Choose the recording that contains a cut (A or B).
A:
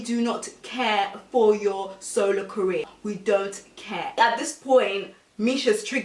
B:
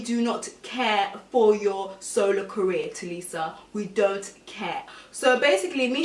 A